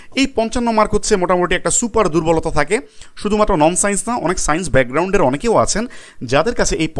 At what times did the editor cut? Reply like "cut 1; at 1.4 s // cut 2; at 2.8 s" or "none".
none